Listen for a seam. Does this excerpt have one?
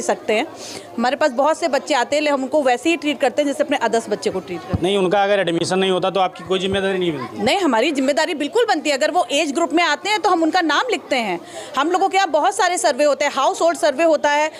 no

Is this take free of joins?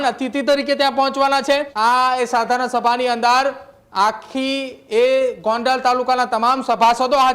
no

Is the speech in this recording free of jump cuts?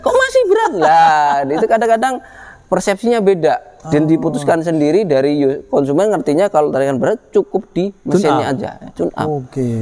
yes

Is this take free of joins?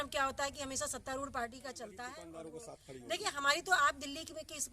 no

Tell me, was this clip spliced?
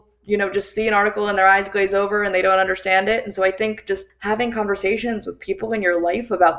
yes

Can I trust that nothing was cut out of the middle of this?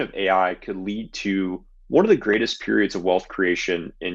yes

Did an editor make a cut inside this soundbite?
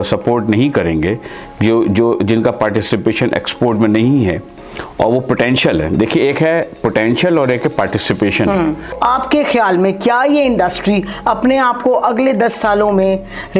yes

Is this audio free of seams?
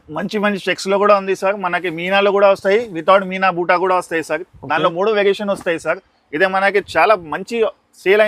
yes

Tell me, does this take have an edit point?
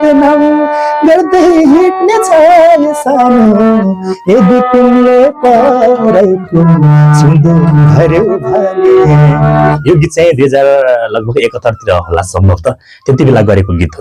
no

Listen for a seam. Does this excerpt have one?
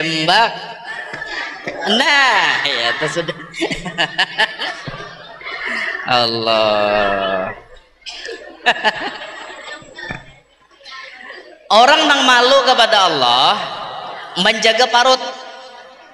no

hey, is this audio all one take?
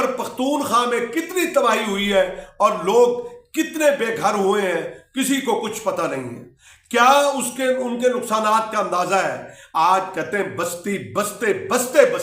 yes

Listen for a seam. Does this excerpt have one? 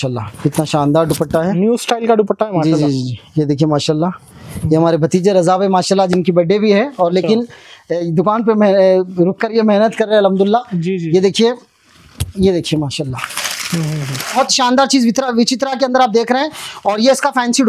yes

